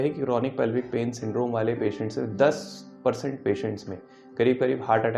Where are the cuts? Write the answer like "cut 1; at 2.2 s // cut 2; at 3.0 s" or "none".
none

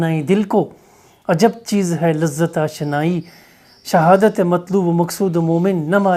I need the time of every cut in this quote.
none

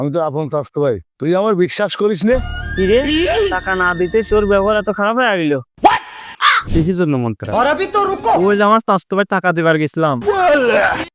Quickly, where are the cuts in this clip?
cut 1; at 6.6 s

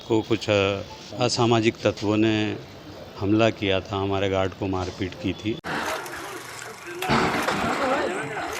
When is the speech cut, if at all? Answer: cut 1; at 1.0 s // cut 2; at 5.6 s

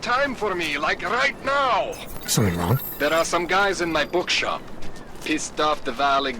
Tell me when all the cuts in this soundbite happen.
cut 1; at 2.9 s

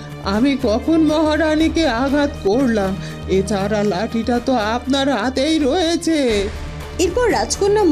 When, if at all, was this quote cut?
none

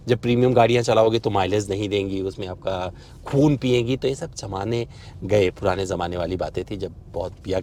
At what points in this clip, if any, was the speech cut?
none

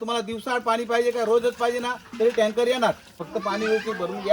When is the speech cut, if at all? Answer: cut 1; at 3.2 s

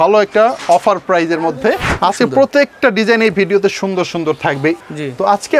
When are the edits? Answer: cut 1; at 2.4 s // cut 2; at 4.8 s

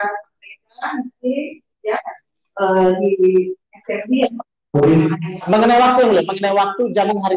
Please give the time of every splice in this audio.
none

